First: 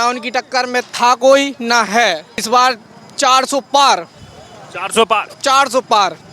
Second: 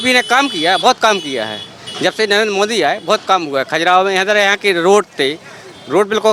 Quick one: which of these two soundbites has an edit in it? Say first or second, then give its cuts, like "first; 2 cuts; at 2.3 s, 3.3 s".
first; 1 cut; at 2.4 s